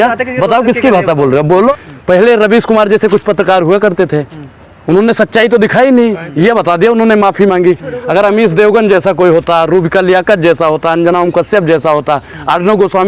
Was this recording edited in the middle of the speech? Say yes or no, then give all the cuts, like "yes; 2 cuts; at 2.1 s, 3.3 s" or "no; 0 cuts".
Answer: yes; 1 cut; at 1.7 s